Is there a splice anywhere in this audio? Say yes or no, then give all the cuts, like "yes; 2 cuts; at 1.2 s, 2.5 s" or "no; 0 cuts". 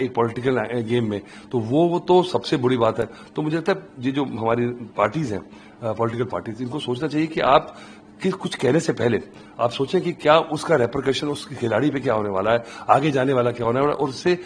no; 0 cuts